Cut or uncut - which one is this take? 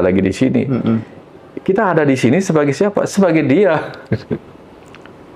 cut